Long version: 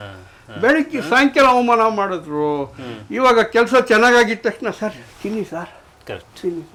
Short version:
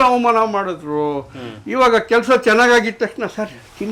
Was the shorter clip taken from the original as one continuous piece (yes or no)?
yes